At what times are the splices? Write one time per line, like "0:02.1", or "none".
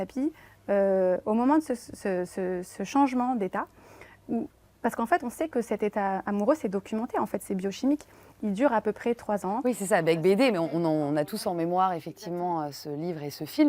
none